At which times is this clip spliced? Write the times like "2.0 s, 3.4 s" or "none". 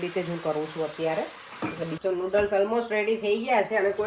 1.9 s